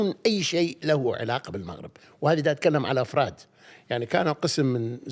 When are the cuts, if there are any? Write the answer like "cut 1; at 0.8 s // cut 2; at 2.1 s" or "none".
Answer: none